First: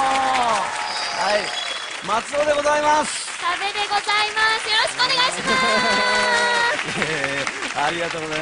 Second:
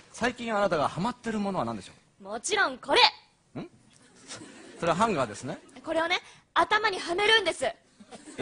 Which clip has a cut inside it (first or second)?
second